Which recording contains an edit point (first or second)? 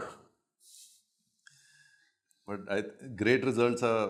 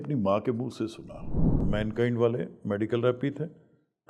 second